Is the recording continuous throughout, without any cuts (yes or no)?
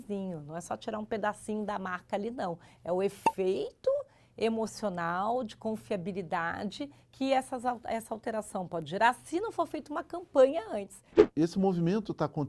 no